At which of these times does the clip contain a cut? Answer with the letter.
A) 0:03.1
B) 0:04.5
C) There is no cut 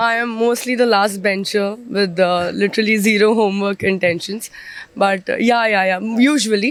C